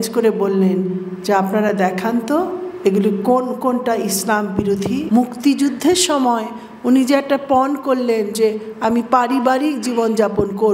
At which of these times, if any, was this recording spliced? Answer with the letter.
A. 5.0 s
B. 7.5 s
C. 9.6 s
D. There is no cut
A